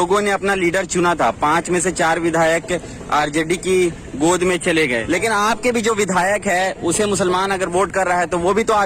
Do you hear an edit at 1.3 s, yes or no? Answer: no